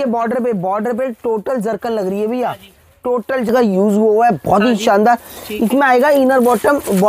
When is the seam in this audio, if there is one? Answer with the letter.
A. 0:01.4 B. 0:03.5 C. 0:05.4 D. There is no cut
B